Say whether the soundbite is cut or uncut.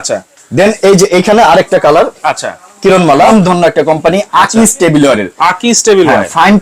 cut